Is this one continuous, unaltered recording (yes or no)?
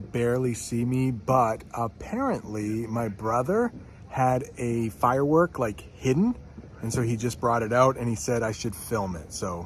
yes